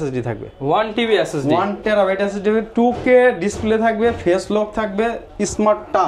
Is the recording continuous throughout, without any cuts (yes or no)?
yes